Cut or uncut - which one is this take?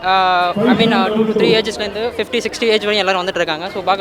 uncut